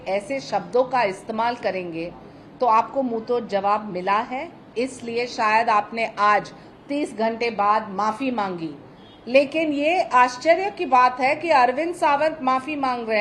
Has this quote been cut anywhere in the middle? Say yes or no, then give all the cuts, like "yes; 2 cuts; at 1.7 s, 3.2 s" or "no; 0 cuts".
no; 0 cuts